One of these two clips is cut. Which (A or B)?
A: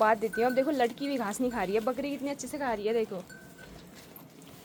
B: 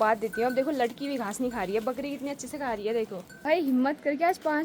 B